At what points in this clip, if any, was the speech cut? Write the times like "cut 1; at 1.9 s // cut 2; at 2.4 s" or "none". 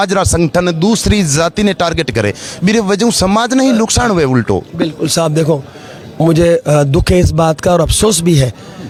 none